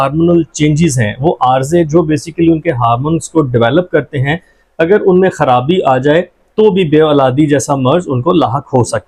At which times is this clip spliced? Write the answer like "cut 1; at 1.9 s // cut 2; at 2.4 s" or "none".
none